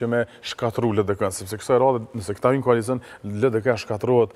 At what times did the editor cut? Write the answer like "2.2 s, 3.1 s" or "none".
none

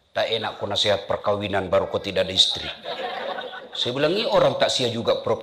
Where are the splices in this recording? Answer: none

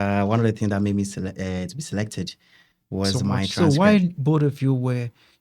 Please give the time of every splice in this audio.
3.5 s

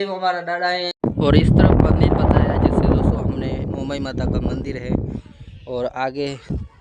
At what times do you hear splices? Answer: 0.9 s

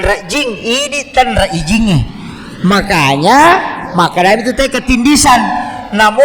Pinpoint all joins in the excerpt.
none

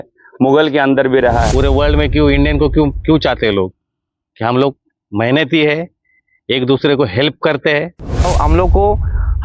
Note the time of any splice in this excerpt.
1.5 s, 8.3 s

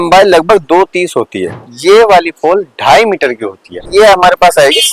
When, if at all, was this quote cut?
1.7 s, 3.9 s

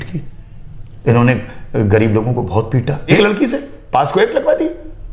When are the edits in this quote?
3.2 s

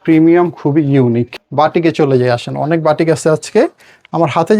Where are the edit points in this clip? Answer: 1.4 s

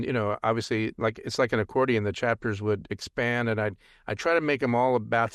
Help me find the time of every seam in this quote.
none

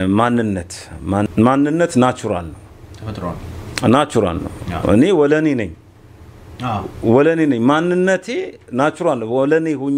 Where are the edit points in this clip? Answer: 1.3 s

